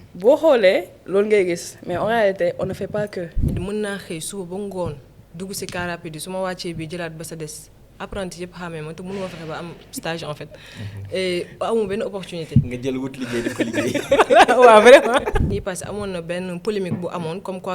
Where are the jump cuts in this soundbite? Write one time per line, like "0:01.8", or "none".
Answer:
0:03.5
0:15.5